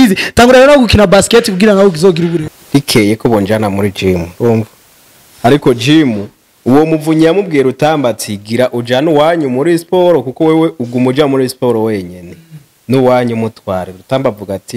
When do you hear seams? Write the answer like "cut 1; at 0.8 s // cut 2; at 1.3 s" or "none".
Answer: cut 1; at 2.6 s